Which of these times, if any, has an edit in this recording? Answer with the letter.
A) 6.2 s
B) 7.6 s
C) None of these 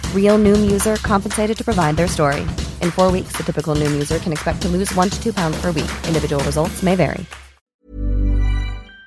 B